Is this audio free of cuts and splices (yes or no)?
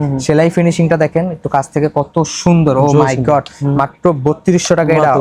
yes